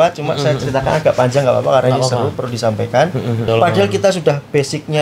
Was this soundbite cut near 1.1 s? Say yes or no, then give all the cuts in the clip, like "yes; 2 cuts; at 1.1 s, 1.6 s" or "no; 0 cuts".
no; 1 cut; at 3.5 s